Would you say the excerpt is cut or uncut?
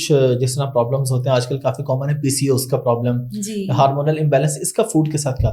uncut